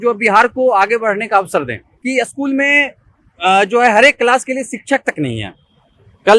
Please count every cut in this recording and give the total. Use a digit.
1